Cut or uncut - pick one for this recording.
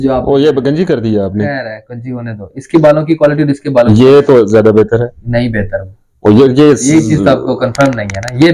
uncut